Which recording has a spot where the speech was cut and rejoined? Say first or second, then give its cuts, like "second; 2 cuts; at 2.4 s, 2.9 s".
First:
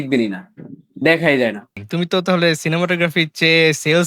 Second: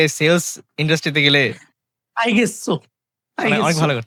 first; 1 cut; at 1.7 s